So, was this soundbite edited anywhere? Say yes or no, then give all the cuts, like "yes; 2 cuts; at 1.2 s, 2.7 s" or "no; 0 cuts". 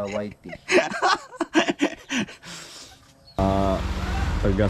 yes; 1 cut; at 3.4 s